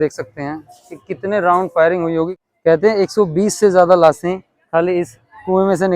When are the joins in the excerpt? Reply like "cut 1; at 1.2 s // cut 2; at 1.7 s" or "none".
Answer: cut 1; at 2.3 s

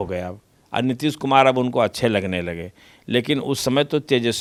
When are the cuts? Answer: none

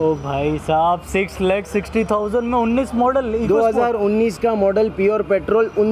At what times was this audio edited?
none

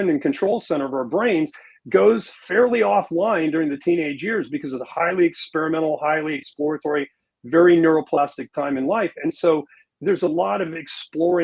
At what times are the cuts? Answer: cut 1; at 9.8 s

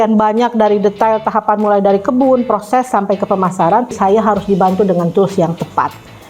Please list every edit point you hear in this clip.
cut 1; at 3.9 s

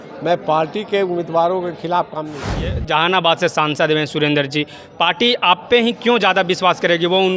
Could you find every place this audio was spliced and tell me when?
cut 1; at 2.8 s

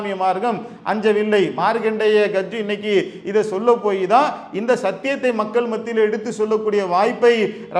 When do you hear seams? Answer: none

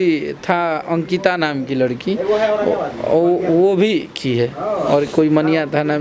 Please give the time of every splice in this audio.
none

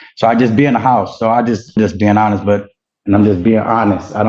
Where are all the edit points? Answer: cut 1; at 1.8 s // cut 2; at 2.8 s

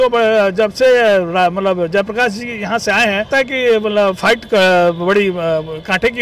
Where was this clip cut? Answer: cut 1; at 3.3 s

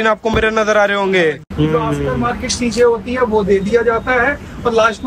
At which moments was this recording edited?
cut 1; at 1.4 s

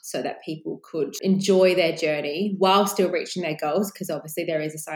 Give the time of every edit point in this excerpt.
cut 1; at 1.1 s

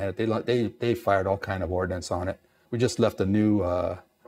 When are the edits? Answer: cut 1; at 2.6 s

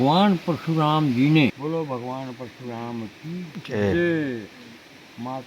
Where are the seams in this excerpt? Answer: cut 1; at 1.6 s

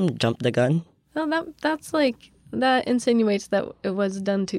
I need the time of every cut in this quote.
cut 1; at 1.0 s

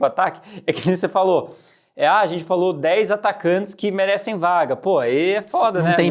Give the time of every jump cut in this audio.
none

